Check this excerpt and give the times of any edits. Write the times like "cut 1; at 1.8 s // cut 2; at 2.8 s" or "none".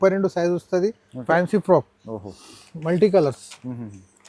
cut 1; at 1.2 s